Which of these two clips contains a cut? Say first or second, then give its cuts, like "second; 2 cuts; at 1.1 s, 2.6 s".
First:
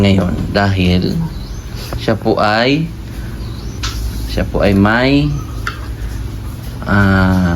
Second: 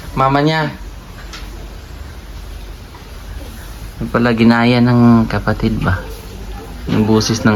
first; 1 cut; at 3.8 s